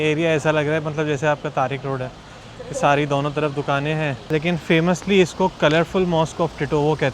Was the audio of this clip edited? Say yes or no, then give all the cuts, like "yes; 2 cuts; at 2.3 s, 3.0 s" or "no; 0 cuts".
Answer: yes; 1 cut; at 4.2 s